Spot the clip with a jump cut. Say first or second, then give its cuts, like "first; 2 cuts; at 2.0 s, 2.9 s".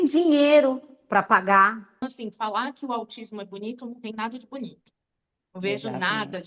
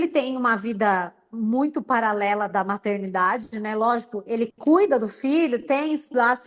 first; 1 cut; at 2.0 s